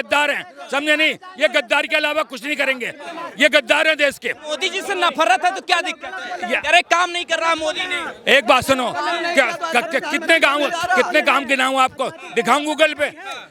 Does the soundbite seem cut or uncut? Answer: uncut